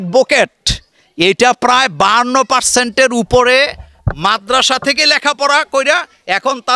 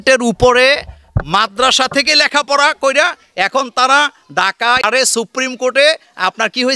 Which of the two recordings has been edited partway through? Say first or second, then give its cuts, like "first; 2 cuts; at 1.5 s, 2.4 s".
second; 1 cut; at 4.8 s